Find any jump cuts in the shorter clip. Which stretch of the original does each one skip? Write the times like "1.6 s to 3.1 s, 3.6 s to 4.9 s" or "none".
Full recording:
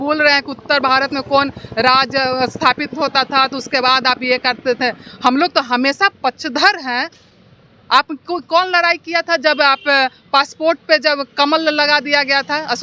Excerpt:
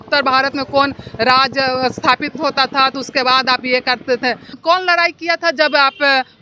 5.2 s to 8.4 s